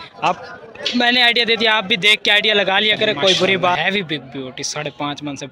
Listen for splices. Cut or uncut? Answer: cut